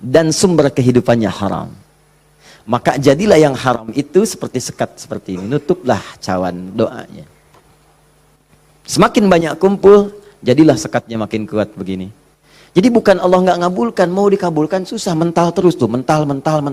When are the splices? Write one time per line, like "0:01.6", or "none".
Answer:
none